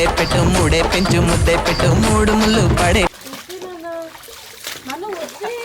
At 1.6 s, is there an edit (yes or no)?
no